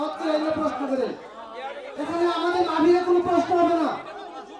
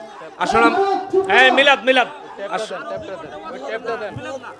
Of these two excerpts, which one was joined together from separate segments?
first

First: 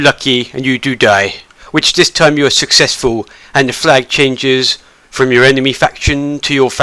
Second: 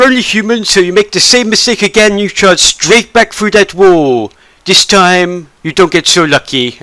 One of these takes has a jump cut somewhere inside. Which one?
first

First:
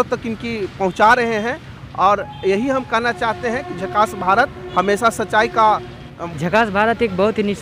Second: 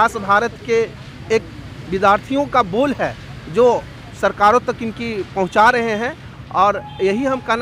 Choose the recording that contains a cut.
first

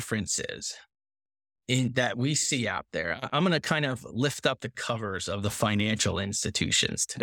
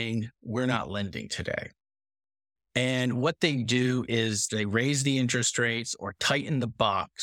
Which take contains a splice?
second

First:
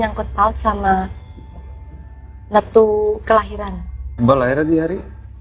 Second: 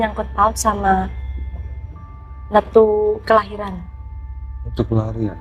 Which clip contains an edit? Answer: first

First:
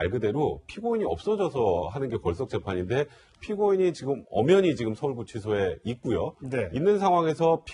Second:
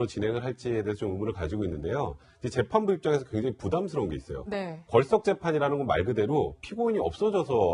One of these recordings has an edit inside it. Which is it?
first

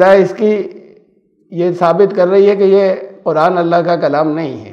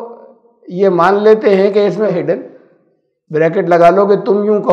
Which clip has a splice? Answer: second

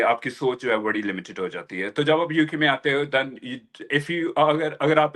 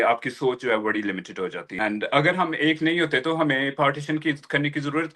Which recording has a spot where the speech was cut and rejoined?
second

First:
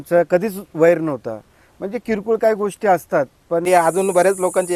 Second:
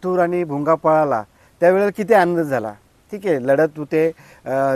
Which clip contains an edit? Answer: first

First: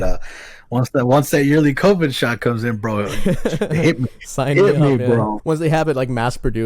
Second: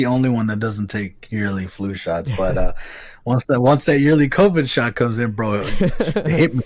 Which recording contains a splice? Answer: first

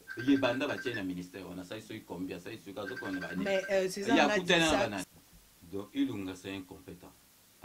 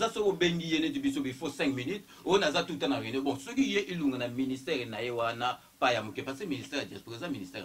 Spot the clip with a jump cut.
first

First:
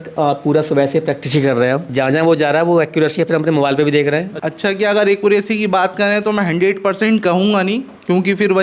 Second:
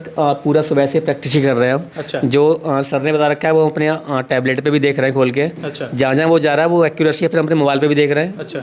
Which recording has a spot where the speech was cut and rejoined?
first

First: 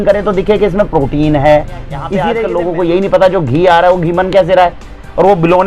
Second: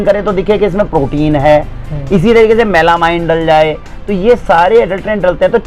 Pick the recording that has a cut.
first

